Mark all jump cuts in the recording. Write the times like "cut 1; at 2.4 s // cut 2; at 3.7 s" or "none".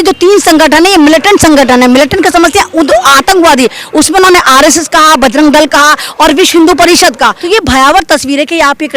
cut 1; at 7.4 s